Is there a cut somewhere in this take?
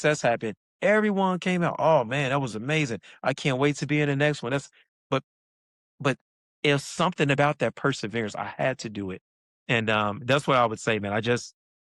no; 0 cuts

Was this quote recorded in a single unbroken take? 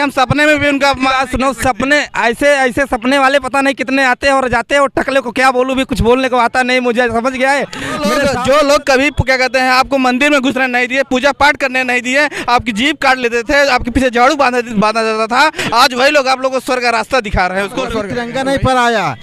no; 2 cuts; at 8.1 s, 18.2 s

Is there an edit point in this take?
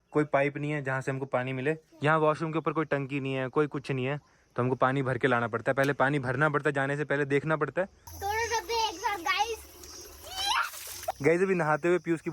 yes; 3 cuts; at 1.8 s, 8.1 s, 11.1 s

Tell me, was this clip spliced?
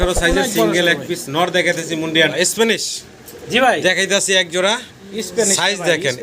yes; 1 cut; at 2.3 s

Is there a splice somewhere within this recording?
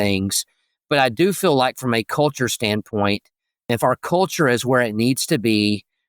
yes; 1 cut; at 3.7 s

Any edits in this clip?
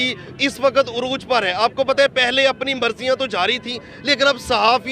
no; 0 cuts

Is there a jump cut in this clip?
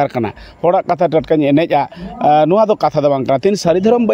no; 0 cuts

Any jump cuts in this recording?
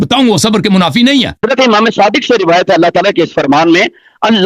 yes; 1 cut; at 1.4 s

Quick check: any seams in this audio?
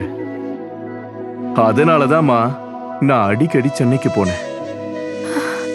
no; 0 cuts

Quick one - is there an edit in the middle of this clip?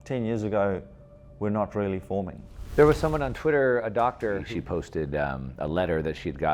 yes; 2 cuts; at 2.7 s, 4.5 s

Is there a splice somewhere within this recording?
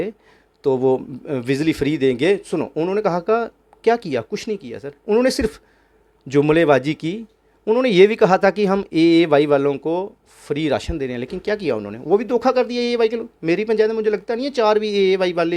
no; 0 cuts

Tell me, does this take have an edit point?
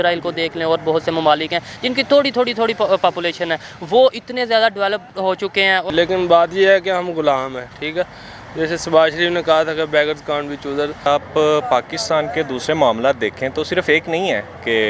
yes; 2 cuts; at 5.9 s, 11.1 s

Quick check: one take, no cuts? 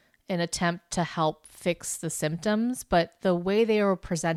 yes; 0 cuts

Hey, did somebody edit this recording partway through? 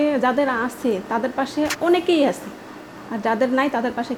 no; 0 cuts

